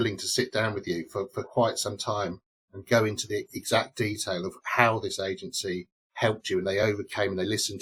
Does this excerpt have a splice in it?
no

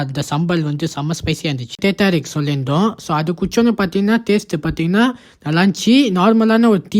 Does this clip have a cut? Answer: yes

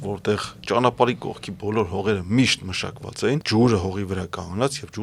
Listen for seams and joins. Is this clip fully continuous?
no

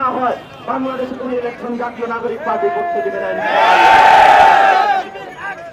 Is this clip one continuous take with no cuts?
yes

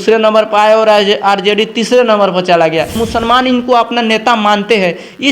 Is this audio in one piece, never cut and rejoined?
no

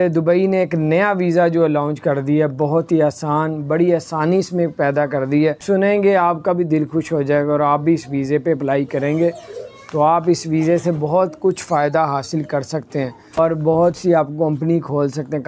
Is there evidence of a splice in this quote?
yes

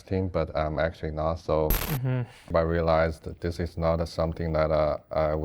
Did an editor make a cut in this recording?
yes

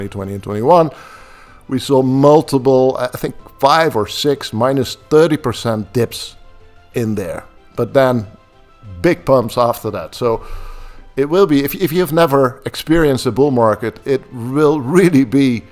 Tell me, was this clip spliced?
no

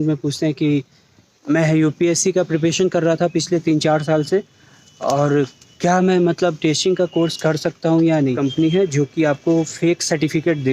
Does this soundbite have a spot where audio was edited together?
yes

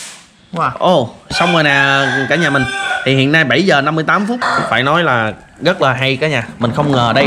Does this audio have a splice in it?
yes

